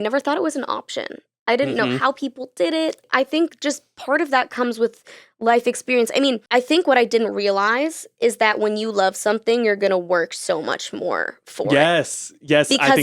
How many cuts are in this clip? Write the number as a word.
two